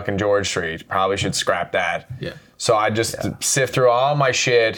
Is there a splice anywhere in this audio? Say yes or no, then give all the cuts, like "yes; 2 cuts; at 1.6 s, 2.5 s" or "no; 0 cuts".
no; 0 cuts